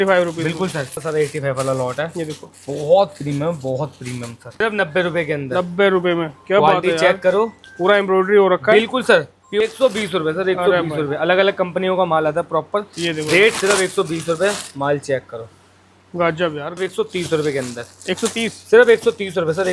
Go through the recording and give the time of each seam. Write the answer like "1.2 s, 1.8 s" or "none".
1.0 s, 4.6 s, 9.4 s, 16.8 s